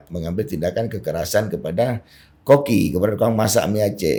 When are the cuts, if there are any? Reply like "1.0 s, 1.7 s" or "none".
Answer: none